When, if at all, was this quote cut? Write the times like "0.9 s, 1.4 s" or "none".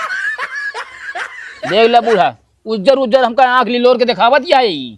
1.7 s